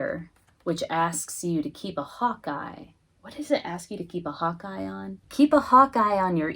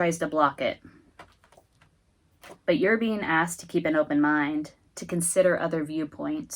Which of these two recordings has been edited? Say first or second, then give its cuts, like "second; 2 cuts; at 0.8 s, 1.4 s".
first; 1 cut; at 5.2 s